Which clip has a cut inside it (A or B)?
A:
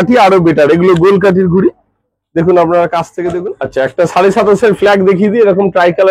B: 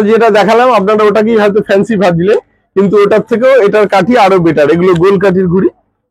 A